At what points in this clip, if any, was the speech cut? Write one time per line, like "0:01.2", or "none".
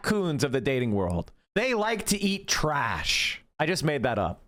none

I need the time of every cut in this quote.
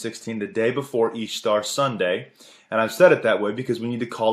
0:02.3

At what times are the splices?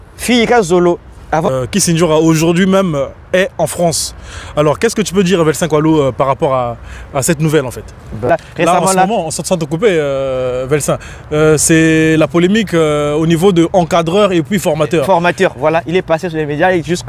0:01.4
0:08.3

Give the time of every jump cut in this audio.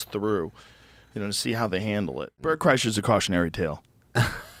none

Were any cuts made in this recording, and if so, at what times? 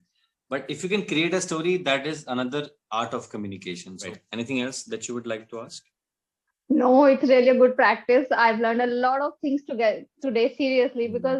0:04.1

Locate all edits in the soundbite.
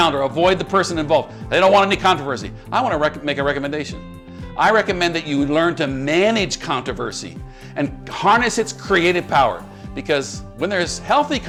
none

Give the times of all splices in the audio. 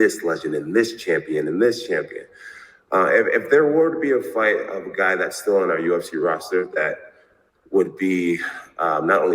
0:02.0

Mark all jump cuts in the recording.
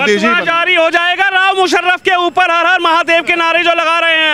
none

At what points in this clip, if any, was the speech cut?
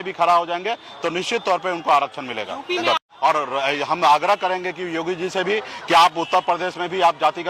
0:03.1

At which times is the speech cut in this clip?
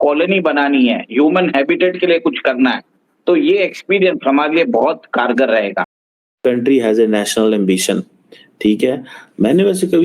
0:06.4

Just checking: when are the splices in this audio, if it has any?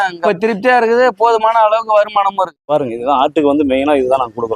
0:02.6

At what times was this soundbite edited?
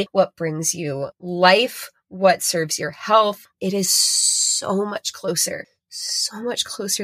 0:03.5

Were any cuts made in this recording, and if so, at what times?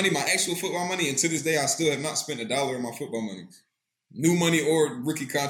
none

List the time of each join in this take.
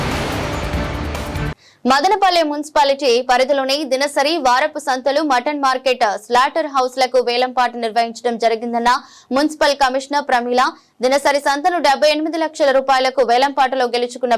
0:01.6

